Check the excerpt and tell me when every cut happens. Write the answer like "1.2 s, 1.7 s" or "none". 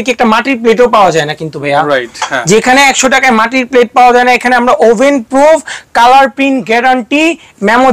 none